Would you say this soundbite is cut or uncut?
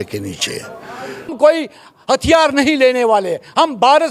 cut